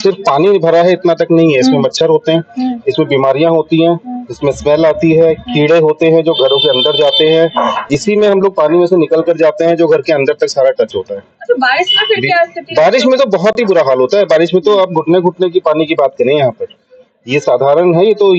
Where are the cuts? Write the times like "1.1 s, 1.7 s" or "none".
none